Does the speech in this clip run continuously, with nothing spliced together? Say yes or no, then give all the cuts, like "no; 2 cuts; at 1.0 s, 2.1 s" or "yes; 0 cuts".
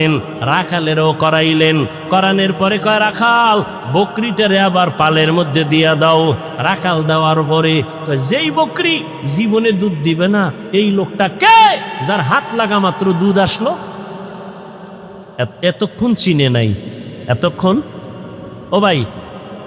yes; 0 cuts